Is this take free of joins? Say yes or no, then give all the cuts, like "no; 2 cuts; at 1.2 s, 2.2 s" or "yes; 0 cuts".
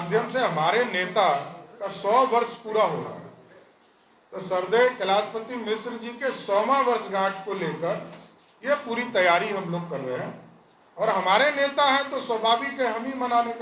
yes; 0 cuts